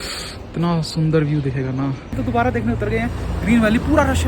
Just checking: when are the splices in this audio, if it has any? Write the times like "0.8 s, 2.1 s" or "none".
2.2 s